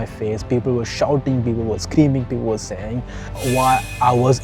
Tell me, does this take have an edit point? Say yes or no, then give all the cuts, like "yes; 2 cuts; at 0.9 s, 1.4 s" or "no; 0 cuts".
no; 0 cuts